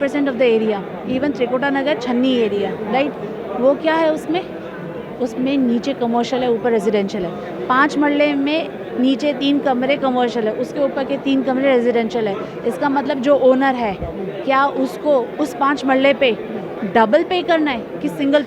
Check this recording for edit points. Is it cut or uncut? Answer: uncut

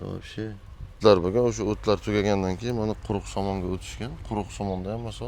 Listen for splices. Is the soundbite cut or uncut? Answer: cut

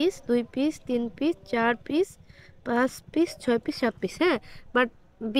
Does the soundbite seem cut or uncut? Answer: uncut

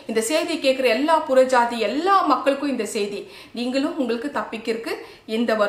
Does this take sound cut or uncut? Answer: uncut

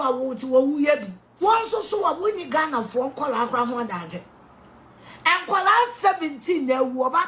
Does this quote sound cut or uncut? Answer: cut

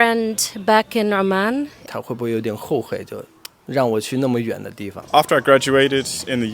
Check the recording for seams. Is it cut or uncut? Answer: cut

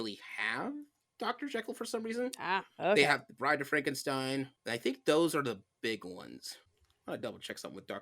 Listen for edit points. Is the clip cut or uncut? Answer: cut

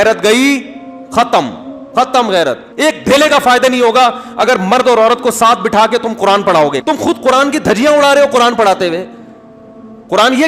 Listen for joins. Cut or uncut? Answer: cut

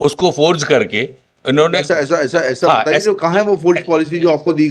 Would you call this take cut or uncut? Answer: uncut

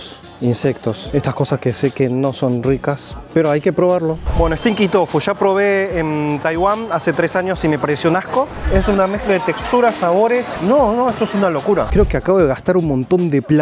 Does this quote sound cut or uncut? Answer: cut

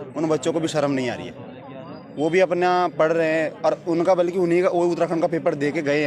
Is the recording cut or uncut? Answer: uncut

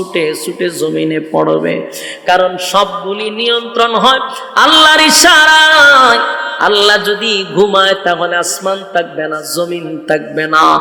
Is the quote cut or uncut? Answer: uncut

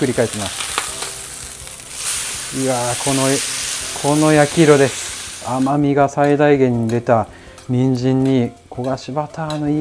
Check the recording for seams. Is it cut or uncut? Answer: cut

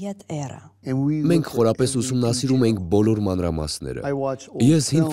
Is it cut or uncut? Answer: cut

